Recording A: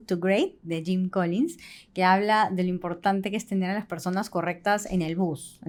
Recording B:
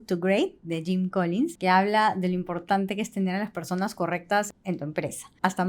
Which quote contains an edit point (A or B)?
B